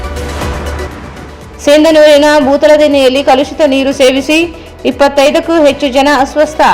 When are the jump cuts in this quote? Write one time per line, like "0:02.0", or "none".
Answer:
0:01.3

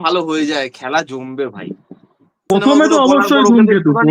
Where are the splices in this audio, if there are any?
0:02.5

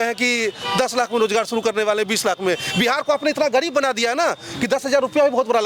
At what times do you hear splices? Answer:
none

